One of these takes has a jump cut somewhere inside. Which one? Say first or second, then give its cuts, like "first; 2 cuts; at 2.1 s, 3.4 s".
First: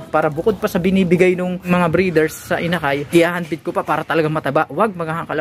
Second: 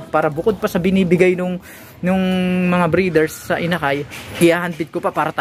first; 2 cuts; at 1.7 s, 3.0 s